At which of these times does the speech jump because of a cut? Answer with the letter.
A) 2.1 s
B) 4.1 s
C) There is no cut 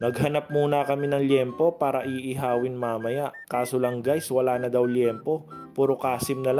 C